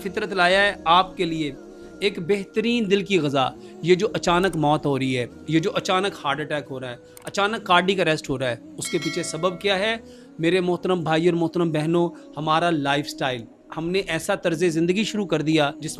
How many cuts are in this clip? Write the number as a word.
zero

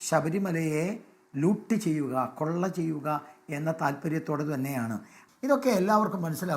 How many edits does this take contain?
one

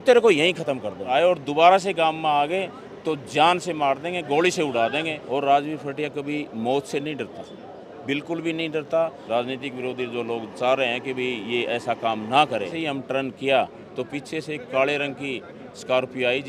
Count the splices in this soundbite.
four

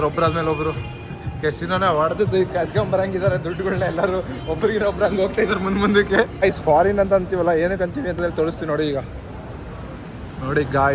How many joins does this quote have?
one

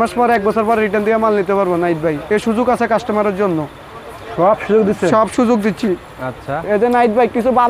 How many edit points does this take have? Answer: zero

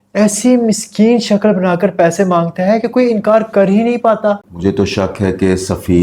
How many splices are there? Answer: one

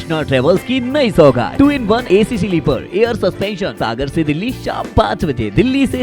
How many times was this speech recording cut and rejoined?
two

